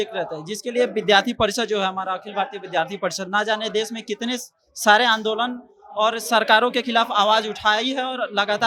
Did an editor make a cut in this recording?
no; 0 cuts

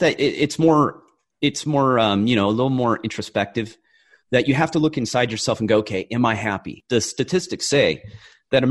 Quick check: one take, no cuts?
yes; 0 cuts

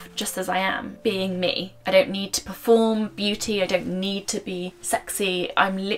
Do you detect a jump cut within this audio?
yes; 3 cuts; at 0.9 s, 1.7 s, 4.7 s

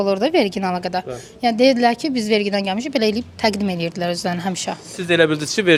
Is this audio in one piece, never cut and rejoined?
yes; 0 cuts

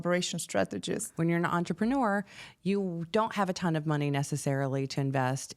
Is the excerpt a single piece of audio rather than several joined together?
no; 1 cut; at 1.1 s

